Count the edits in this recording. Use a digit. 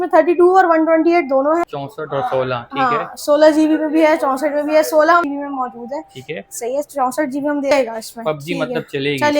3